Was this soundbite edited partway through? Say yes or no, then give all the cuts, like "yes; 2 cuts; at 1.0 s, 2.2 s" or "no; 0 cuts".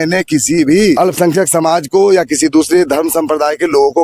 yes; 1 cut; at 1.0 s